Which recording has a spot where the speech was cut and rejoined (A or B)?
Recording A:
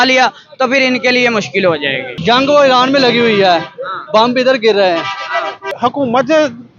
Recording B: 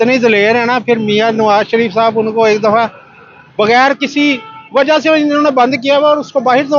A